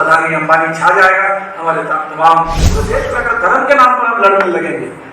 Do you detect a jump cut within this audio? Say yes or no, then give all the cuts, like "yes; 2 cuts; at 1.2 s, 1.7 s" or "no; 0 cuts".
yes; 1 cut; at 2.9 s